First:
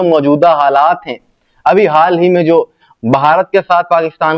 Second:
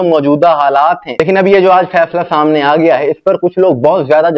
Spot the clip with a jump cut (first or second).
second